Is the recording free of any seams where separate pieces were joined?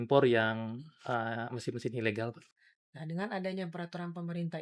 no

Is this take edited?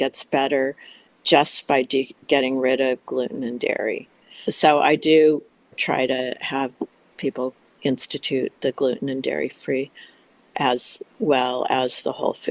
yes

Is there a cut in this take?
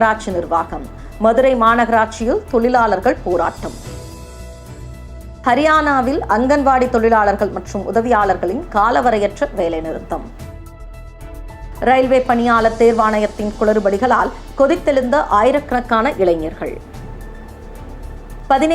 no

